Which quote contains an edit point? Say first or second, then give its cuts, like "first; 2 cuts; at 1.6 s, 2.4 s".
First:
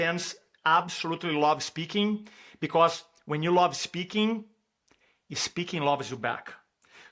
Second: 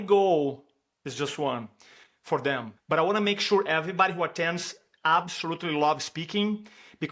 second; 1 cut; at 2.7 s